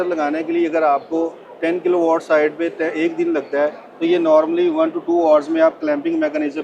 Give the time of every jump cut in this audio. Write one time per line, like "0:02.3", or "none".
none